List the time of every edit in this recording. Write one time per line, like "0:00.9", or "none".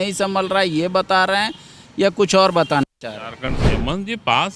0:03.6